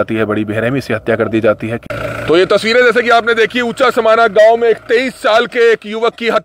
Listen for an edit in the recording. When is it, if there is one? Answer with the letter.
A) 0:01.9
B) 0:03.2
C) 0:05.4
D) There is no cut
A